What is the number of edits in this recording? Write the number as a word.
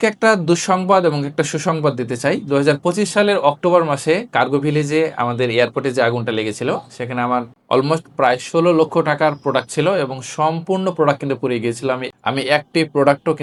zero